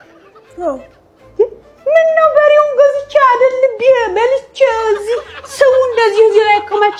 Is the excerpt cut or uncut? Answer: uncut